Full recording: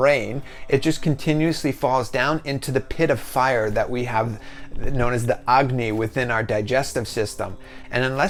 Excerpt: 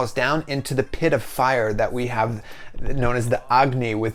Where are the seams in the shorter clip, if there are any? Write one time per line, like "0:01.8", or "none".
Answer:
none